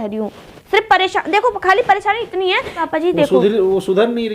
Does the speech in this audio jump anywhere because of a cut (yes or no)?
yes